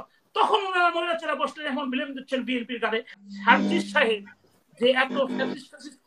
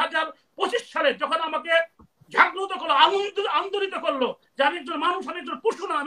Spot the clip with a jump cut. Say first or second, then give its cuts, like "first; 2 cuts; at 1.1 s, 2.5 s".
first; 1 cut; at 3.1 s